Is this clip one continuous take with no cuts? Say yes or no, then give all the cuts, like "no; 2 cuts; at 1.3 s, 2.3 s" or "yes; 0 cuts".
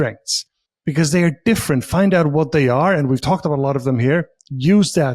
yes; 0 cuts